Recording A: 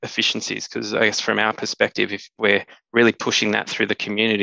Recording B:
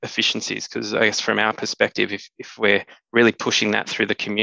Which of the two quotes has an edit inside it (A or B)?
A